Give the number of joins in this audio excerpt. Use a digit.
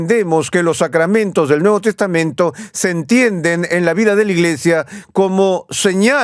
0